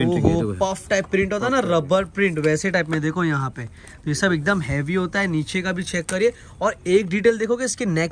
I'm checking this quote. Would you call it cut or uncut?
uncut